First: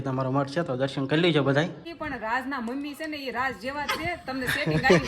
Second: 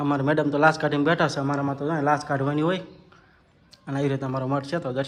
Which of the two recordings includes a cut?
first; 1 cut; at 1.9 s

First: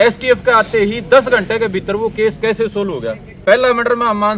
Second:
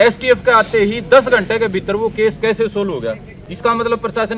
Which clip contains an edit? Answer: first; 1 cut; at 3.2 s

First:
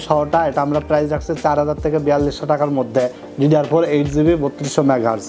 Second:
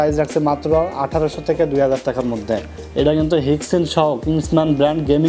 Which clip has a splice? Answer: second; 1 cut; at 2.8 s

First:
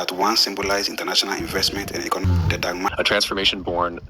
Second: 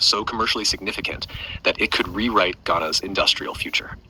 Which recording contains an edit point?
first; 1 cut; at 2.9 s

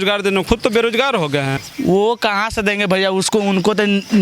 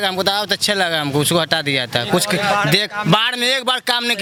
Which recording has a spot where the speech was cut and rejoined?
first; 1 cut; at 1.6 s

